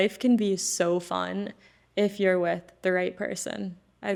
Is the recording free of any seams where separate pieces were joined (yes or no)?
yes